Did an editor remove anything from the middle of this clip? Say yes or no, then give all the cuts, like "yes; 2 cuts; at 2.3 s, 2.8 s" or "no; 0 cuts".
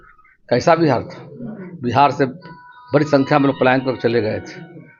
no; 0 cuts